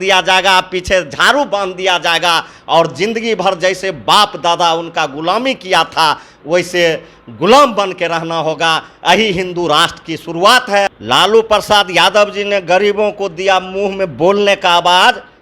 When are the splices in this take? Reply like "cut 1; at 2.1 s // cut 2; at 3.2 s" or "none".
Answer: cut 1; at 11.0 s

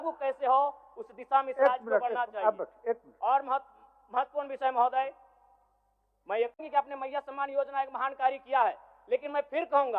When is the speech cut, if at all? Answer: cut 1; at 6.6 s

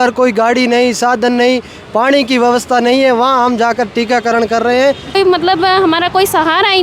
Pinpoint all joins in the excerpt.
cut 1; at 5.2 s

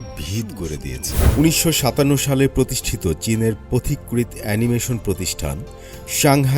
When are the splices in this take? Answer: cut 1; at 1.3 s

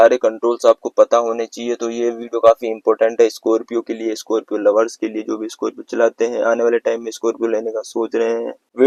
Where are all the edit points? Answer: none

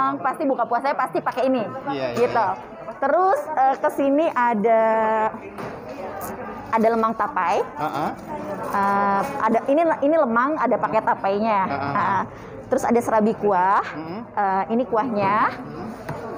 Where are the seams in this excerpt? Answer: none

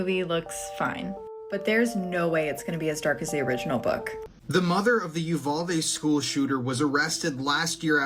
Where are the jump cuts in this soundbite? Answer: cut 1; at 4.2 s

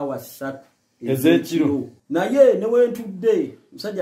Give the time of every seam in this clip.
cut 1; at 2.0 s

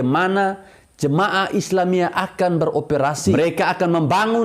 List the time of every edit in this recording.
cut 1; at 3.3 s

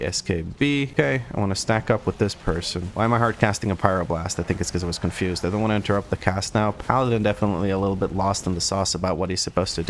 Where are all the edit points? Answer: none

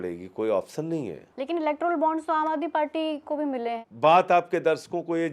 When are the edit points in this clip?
cut 1; at 1.3 s // cut 2; at 3.8 s

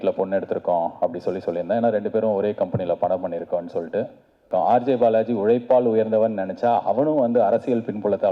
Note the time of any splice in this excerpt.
cut 1; at 4.4 s

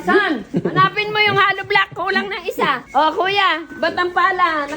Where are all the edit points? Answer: cut 1; at 2.8 s

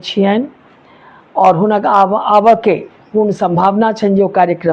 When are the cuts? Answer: none

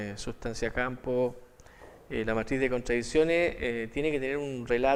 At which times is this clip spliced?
none

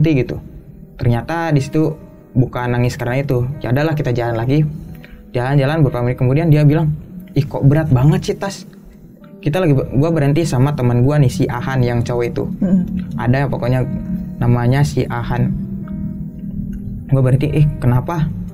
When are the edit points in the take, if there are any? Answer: none

